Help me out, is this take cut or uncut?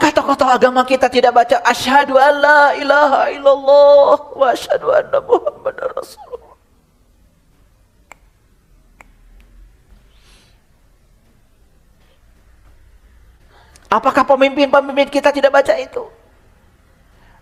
uncut